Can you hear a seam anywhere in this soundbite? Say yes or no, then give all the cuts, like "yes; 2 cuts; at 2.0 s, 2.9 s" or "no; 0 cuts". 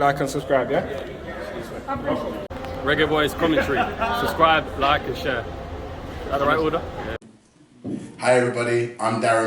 yes; 2 cuts; at 2.4 s, 7.3 s